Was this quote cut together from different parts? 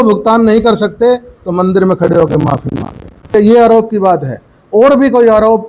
yes; 1 cut; at 3.3 s

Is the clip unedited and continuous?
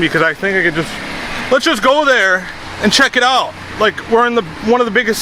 yes; 0 cuts

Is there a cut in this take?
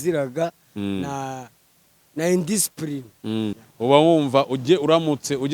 yes; 1 cut; at 3.7 s

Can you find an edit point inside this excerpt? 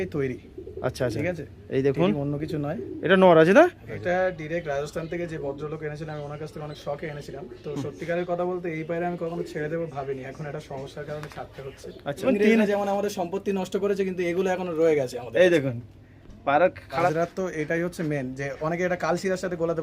yes; 3 cuts; at 3.9 s, 12.2 s, 17.1 s

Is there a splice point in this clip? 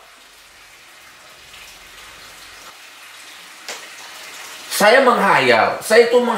yes; 1 cut; at 2.7 s

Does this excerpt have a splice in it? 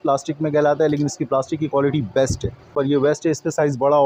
yes; 1 cut; at 2.7 s

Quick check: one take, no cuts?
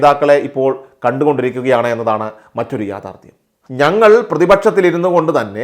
no; 1 cut; at 3.6 s

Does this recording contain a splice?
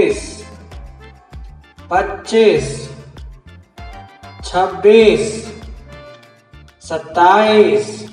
yes; 2 cuts; at 3.4 s, 4.4 s

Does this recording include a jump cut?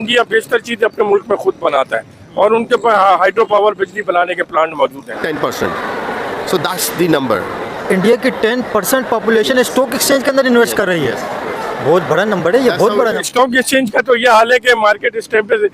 yes; 2 cuts; at 5.2 s, 13.2 s

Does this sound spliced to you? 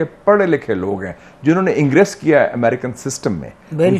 no; 0 cuts

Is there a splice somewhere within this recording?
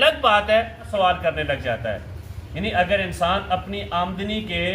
yes; 1 cut; at 0.9 s

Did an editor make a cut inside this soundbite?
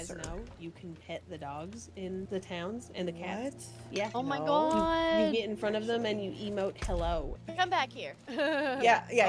yes; 2 cuts; at 2.3 s, 7.4 s

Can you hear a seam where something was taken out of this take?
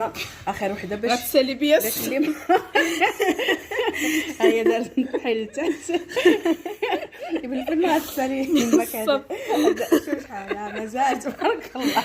no; 0 cuts

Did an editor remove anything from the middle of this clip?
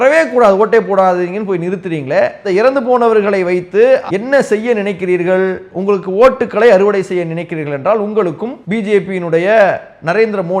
yes; 2 cuts; at 4.1 s, 8.5 s

